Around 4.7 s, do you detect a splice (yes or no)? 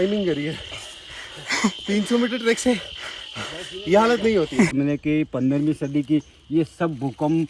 yes